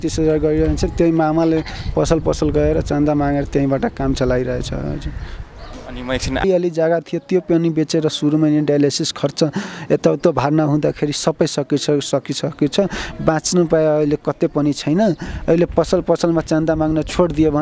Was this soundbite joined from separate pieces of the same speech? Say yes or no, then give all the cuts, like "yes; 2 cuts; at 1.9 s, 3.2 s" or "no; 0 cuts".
yes; 1 cut; at 6.4 s